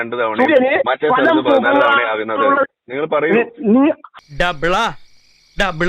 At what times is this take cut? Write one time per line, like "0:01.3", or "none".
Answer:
0:04.2

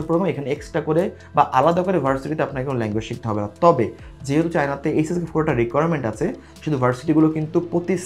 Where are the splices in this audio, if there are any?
none

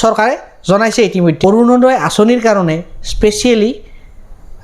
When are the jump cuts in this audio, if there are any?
0:01.4

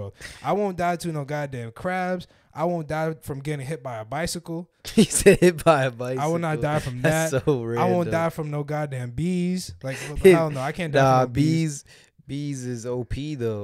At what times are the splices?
none

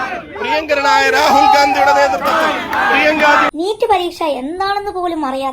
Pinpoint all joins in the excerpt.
0:03.5

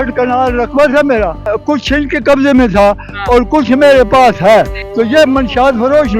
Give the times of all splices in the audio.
0:01.6
0:04.8

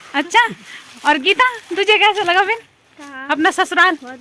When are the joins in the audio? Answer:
none

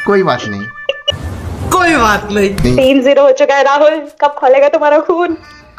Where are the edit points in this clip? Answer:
0:02.6

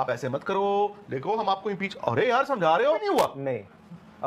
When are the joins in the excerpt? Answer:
0:03.0

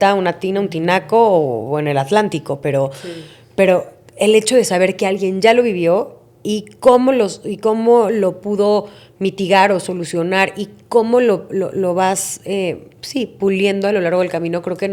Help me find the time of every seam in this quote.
none

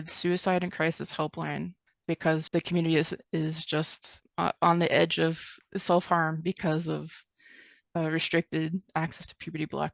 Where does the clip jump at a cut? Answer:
0:01.8
0:02.5
0:05.5

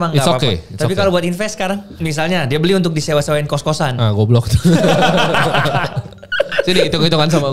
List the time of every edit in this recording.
0:02.0

